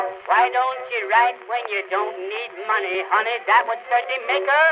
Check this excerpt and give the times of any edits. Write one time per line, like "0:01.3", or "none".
0:02.9